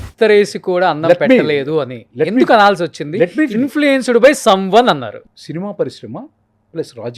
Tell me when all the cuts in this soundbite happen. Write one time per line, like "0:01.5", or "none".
0:05.2